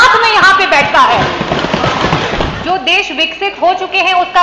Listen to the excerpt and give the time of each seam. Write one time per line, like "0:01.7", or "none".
0:02.5